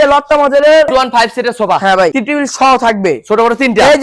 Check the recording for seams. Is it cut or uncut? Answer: cut